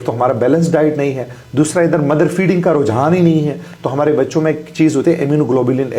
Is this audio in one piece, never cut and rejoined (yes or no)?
yes